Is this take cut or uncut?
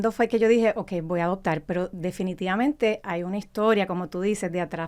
uncut